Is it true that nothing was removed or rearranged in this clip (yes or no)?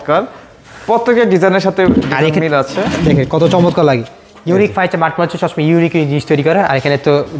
yes